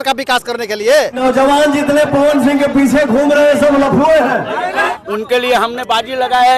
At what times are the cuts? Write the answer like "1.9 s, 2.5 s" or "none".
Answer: 1.2 s, 4.9 s